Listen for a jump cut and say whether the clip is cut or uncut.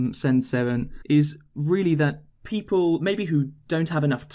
cut